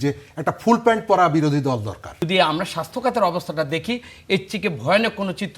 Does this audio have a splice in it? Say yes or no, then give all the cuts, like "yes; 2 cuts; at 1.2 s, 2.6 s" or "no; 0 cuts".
yes; 1 cut; at 2.3 s